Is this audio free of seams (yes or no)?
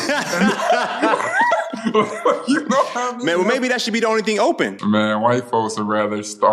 no